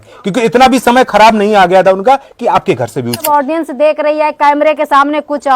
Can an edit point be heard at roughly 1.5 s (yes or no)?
no